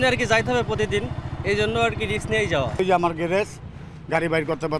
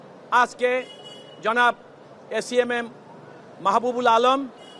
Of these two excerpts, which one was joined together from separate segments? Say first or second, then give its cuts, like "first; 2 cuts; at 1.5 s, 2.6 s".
first; 1 cut; at 2.7 s